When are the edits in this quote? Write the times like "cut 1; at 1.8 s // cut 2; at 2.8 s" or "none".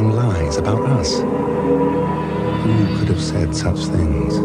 cut 1; at 3.2 s